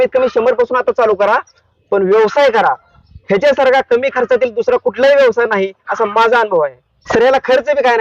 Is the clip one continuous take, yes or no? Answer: yes